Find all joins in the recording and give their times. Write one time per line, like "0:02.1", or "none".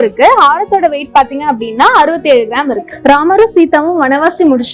0:02.9